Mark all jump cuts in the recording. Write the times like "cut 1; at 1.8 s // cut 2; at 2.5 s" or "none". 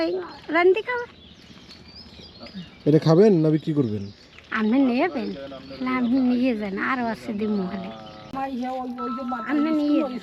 cut 1; at 8.3 s